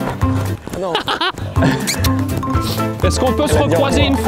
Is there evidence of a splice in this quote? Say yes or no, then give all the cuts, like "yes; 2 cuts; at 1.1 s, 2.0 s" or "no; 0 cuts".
no; 0 cuts